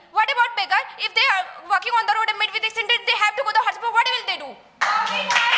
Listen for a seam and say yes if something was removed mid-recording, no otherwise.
no